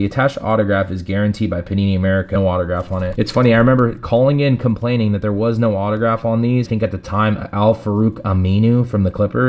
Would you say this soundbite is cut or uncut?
cut